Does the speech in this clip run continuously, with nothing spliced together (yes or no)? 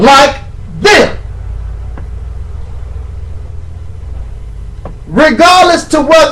yes